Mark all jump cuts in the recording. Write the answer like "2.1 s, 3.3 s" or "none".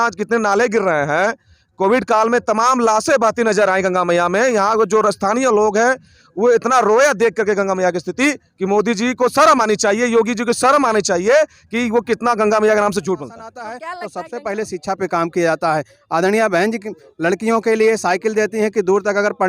13.7 s